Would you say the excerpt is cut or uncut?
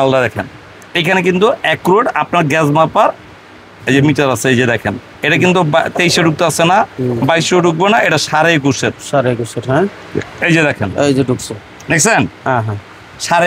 uncut